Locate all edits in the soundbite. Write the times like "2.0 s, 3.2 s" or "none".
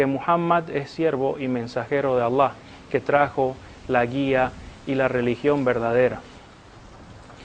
1.3 s